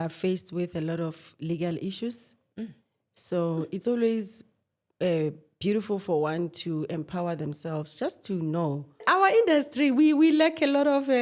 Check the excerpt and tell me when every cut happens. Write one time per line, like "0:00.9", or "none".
0:09.0